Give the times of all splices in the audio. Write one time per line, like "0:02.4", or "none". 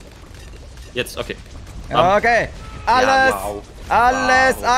none